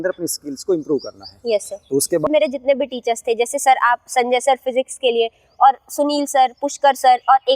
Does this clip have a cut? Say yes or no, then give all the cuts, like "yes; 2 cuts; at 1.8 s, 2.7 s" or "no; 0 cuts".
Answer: yes; 1 cut; at 2.3 s